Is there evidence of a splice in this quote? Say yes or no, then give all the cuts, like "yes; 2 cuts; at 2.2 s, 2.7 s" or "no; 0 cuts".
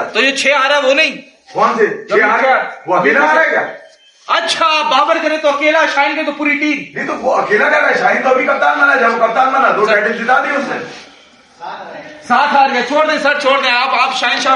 no; 0 cuts